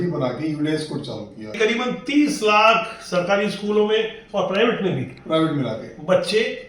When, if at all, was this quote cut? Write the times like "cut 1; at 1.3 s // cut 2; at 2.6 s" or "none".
cut 1; at 1.5 s